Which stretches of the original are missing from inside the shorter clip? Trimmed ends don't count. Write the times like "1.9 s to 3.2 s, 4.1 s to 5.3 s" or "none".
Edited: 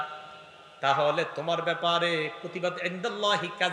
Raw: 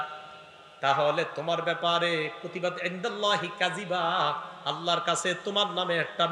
none